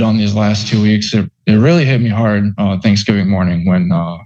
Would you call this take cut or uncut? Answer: uncut